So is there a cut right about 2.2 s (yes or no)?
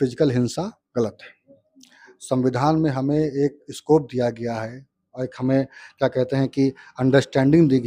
no